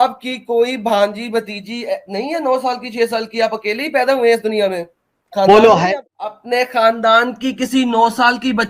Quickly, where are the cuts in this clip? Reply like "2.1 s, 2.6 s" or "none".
5.9 s